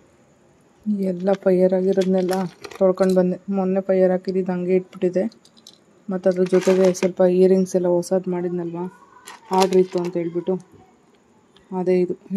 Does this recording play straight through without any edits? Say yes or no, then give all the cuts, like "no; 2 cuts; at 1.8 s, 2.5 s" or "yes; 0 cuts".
yes; 0 cuts